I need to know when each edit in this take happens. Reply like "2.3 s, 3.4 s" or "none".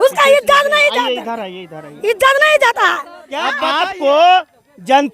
3.5 s